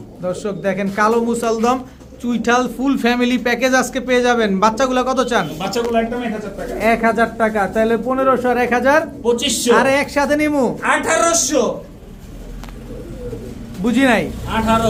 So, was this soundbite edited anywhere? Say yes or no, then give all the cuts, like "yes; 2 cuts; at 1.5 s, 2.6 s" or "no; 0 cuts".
no; 0 cuts